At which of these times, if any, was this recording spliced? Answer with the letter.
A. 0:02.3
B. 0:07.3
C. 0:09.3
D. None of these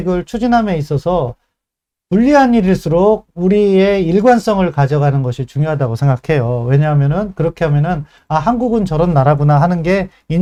D